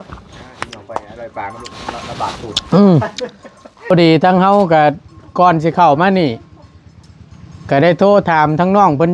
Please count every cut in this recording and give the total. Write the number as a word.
one